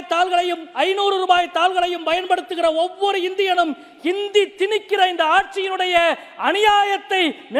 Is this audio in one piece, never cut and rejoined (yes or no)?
yes